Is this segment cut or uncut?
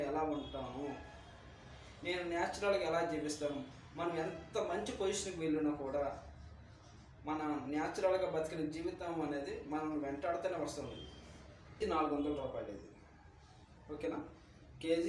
cut